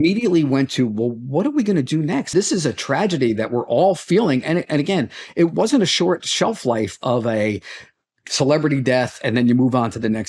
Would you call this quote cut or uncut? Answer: cut